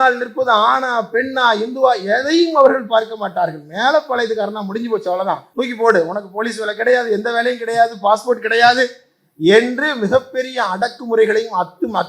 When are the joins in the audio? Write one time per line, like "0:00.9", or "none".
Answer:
0:05.4